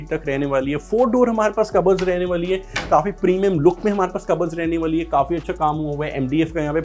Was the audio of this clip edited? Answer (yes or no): no